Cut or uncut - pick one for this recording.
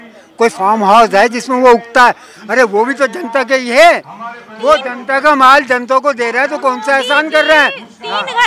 uncut